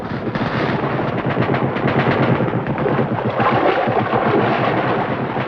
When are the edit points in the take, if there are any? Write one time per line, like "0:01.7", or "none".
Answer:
0:03.9